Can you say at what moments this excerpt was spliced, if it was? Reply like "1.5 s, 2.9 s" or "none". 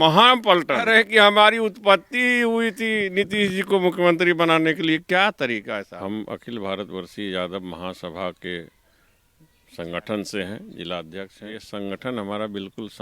0.9 s, 5.8 s, 11.7 s